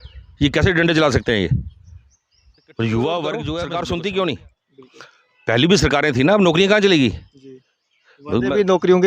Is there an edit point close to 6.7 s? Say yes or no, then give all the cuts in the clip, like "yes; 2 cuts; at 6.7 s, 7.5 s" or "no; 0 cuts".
no; 1 cut; at 3.6 s